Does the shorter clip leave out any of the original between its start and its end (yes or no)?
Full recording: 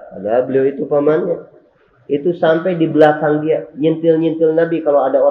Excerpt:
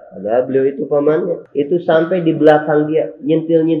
yes